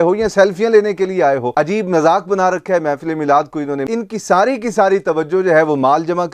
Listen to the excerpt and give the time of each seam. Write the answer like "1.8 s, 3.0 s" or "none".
1.5 s, 3.8 s